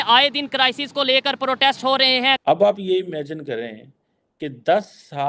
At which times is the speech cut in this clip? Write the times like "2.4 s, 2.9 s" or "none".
2.4 s